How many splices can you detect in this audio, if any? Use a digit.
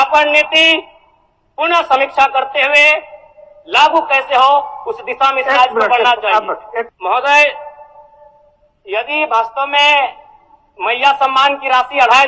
1